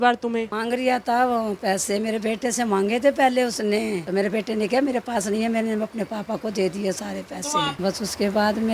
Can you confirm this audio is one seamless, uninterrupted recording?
no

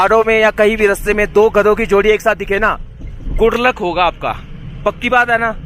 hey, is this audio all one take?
yes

